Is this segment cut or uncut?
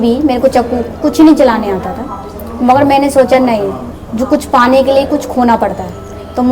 uncut